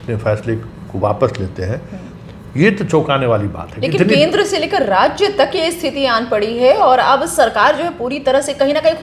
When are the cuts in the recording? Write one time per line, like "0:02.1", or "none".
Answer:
none

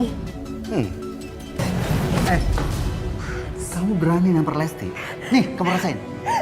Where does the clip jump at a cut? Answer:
0:01.6

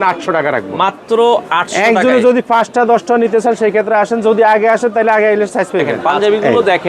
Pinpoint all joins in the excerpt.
0:06.0

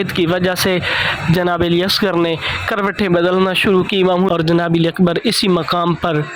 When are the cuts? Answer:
0:04.3

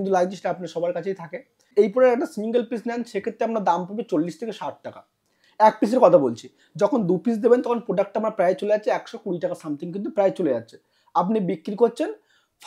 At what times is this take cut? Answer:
0:01.6

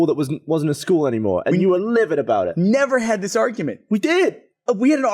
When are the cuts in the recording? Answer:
none

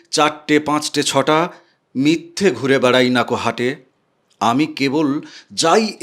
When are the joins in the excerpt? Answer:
none

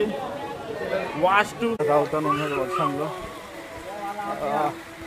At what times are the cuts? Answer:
0:01.8

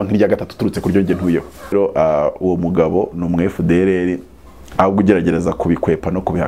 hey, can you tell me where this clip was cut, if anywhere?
0:01.7

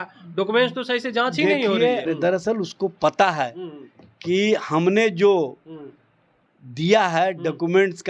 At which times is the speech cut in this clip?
0:02.1

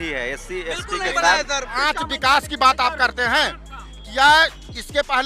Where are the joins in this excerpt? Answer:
0:01.9

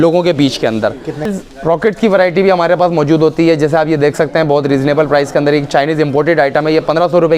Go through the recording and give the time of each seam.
0:01.3

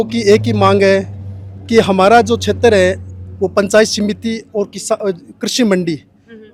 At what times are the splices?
none

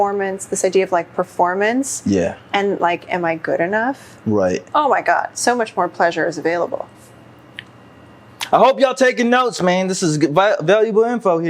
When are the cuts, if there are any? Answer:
0:04.7
0:06.9

